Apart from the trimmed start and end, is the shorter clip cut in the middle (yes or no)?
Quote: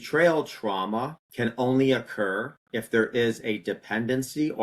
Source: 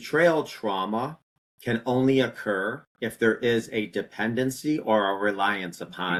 yes